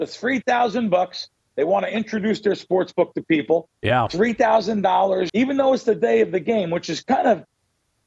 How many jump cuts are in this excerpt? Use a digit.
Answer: 1